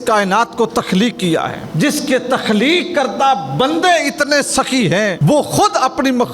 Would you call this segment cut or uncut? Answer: cut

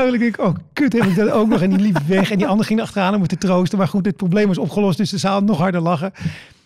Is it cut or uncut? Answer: uncut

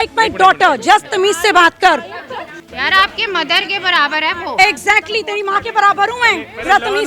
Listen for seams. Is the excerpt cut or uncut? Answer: cut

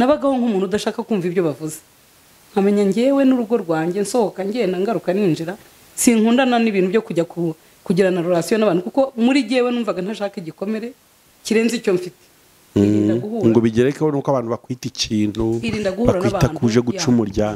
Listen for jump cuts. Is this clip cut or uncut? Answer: uncut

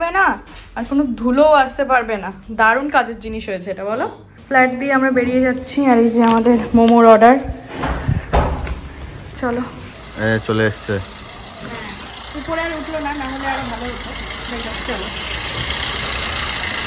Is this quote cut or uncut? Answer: uncut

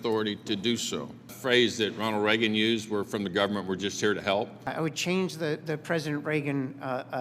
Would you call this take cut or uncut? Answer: cut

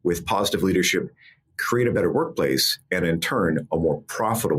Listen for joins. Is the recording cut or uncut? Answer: uncut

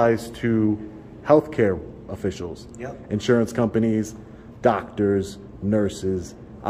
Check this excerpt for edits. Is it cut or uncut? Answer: uncut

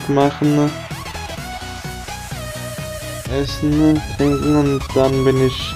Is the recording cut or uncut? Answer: uncut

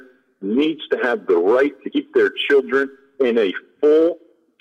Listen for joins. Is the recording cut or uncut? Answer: uncut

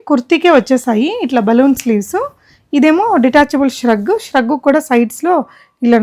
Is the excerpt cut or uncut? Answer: uncut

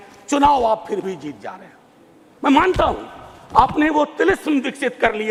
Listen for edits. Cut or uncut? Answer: uncut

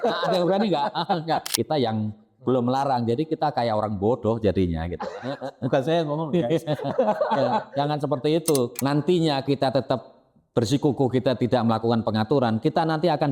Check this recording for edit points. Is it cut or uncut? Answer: cut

